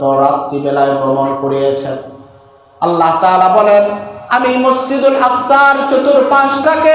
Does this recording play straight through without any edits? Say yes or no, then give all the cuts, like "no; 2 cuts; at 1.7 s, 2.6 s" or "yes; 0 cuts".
yes; 0 cuts